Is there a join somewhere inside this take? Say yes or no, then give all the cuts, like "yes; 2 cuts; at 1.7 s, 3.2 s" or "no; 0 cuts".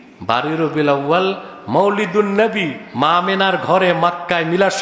no; 0 cuts